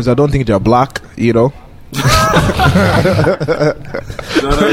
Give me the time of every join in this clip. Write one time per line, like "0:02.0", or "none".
none